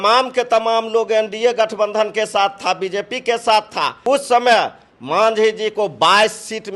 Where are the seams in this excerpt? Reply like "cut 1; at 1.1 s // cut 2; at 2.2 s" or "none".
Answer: cut 1; at 4.0 s